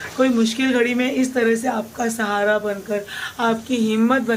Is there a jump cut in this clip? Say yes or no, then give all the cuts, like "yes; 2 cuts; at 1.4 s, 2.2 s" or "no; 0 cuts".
no; 0 cuts